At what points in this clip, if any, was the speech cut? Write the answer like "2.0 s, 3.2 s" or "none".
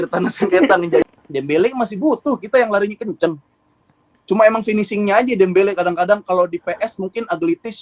1.1 s